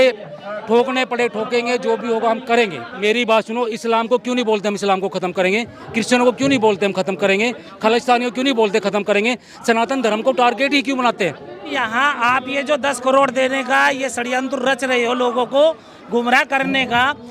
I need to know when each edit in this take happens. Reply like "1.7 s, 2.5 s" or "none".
2.9 s, 11.8 s

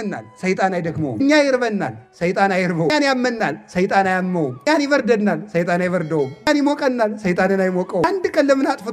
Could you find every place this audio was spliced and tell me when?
1.2 s, 2.9 s, 4.7 s, 6.5 s, 8.0 s

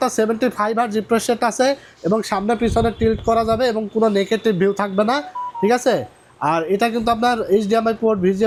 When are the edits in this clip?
none

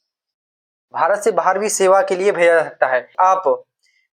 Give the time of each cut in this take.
3.1 s

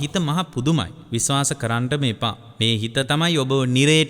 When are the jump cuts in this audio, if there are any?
1.0 s, 2.5 s

